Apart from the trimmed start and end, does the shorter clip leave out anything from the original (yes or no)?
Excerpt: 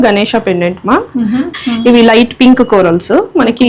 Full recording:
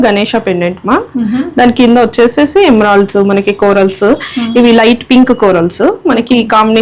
yes